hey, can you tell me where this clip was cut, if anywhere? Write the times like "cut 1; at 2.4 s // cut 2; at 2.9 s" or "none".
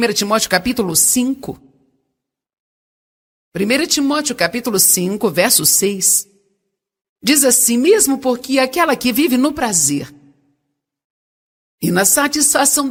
none